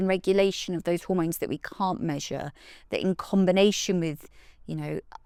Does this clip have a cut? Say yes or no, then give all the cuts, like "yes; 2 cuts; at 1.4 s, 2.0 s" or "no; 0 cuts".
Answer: no; 0 cuts